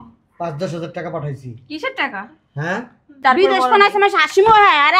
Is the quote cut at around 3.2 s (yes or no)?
yes